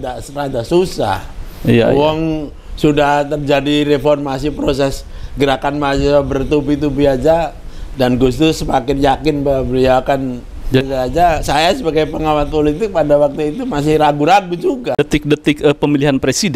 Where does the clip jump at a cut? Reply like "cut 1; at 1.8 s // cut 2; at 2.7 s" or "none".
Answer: cut 1; at 10.8 s // cut 2; at 15.0 s